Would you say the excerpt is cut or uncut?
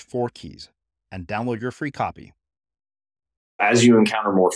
cut